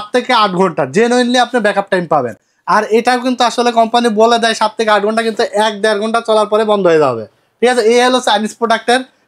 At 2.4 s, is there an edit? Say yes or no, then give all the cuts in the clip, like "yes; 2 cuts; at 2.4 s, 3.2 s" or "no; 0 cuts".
no; 0 cuts